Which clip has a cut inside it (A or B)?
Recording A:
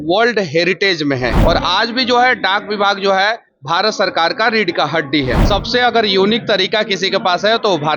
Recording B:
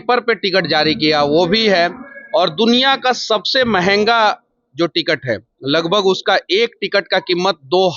A